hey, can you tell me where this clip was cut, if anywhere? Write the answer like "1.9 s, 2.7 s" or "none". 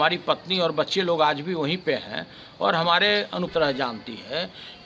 3.5 s